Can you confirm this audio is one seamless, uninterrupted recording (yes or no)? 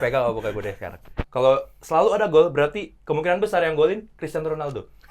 no